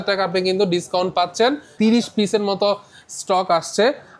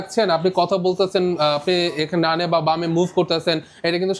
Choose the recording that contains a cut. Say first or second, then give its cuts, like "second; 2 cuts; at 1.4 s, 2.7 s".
first; 1 cut; at 1.7 s